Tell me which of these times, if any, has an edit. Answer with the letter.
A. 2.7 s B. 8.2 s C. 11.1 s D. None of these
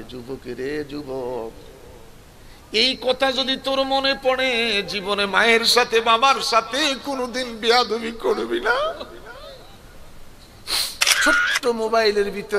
C